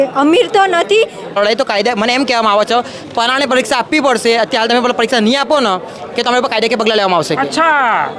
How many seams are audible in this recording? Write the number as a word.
one